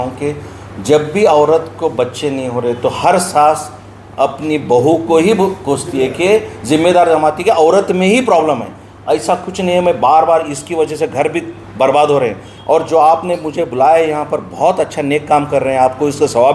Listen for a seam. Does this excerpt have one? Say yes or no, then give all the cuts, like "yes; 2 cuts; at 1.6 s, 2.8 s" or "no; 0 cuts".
no; 0 cuts